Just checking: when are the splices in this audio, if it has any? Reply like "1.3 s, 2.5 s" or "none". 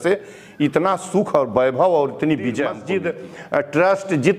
2.8 s